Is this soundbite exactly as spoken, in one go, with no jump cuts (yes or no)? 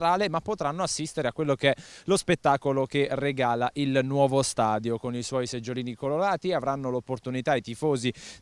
no